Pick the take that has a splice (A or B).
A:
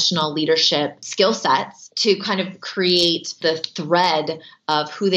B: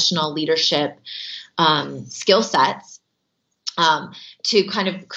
A